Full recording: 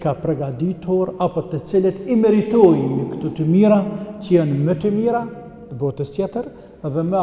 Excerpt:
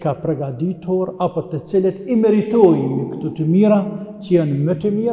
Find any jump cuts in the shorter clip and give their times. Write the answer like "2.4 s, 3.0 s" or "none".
none